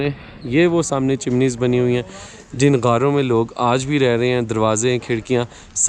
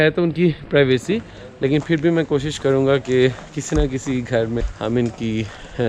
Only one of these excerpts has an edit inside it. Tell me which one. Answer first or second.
second